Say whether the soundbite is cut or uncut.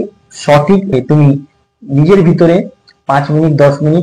cut